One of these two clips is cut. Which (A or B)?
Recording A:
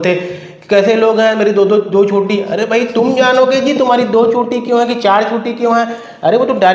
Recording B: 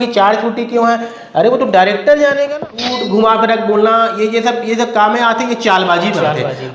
B